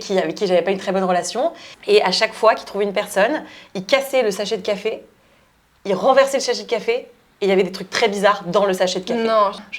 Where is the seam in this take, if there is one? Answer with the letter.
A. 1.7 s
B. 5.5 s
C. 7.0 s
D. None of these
A